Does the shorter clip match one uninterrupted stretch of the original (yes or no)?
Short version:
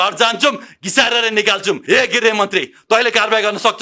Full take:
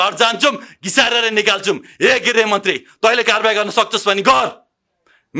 no